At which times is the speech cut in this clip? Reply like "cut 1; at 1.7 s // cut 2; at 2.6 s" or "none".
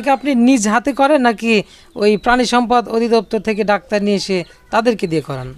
none